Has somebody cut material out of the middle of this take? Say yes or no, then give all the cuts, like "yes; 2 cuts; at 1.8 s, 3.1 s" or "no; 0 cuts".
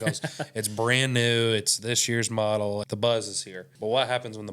yes; 2 cuts; at 2.8 s, 3.7 s